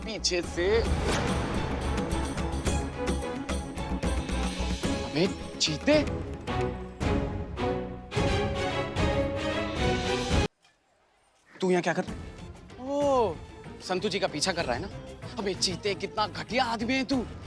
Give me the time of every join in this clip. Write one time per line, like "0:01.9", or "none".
0:10.5